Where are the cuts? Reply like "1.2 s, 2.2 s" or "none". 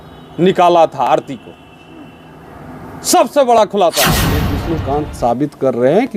4.6 s